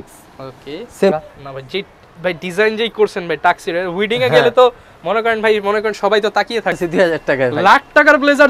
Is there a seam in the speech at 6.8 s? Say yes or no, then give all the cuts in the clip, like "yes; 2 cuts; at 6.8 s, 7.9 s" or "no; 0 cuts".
yes; 2 cuts; at 1.1 s, 6.8 s